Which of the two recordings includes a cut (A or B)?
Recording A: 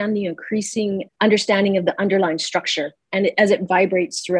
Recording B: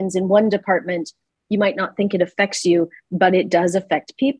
A